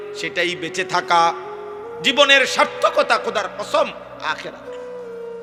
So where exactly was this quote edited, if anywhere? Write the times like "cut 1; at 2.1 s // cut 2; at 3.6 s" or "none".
none

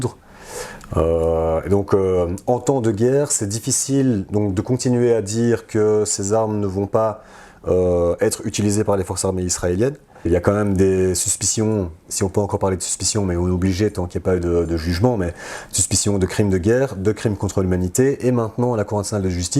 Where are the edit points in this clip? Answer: cut 1; at 10.3 s

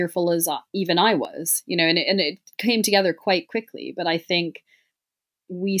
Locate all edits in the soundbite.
none

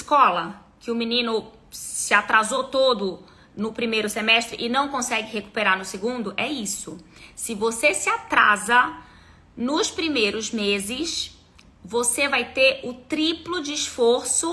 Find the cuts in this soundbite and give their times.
none

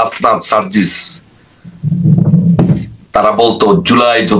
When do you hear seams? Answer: none

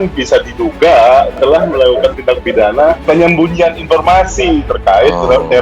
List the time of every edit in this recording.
cut 1; at 3.0 s

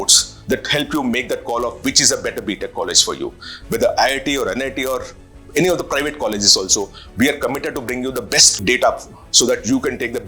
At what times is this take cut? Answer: cut 1; at 8.6 s

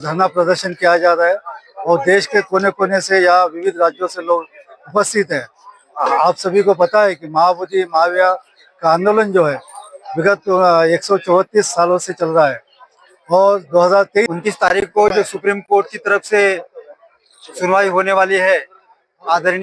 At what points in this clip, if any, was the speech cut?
cut 1; at 14.3 s

